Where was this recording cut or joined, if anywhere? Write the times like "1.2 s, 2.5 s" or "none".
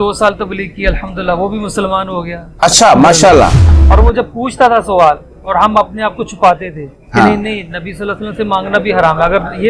3.8 s